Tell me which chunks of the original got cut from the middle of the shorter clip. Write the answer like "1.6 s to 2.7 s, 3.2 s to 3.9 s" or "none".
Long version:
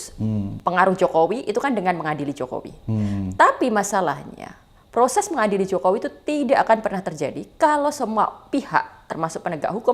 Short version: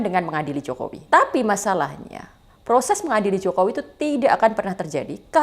2.7 s to 3.3 s